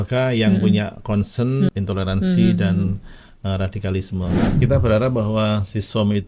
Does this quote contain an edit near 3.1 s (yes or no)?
no